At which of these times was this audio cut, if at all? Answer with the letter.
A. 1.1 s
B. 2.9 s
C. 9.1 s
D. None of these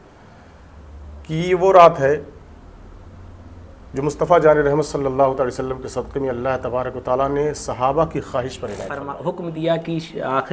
C